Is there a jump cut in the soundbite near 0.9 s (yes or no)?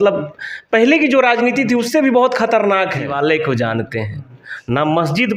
no